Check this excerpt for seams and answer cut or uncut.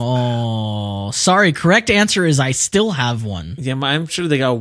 uncut